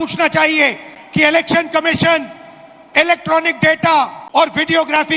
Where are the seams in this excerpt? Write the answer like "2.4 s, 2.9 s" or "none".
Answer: 4.2 s